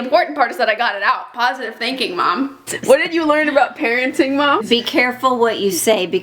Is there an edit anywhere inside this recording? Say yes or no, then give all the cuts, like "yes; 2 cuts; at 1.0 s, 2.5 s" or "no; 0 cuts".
yes; 2 cuts; at 2.7 s, 4.6 s